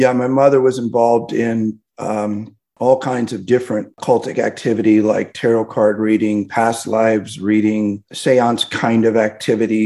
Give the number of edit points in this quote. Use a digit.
1